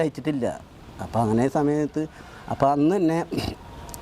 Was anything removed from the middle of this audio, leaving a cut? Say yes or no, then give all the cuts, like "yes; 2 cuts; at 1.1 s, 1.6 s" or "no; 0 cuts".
no; 0 cuts